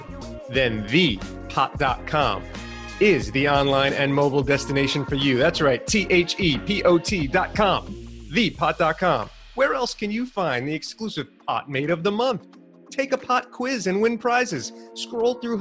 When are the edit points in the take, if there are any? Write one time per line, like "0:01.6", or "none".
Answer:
none